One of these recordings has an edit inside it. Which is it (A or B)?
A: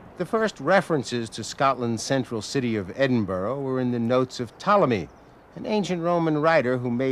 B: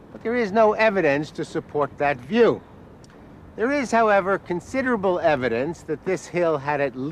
A